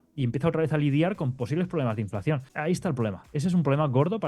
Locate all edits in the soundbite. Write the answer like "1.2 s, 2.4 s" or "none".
2.5 s